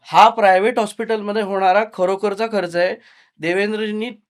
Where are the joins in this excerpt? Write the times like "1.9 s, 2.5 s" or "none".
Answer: none